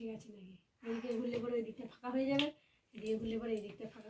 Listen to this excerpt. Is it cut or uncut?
uncut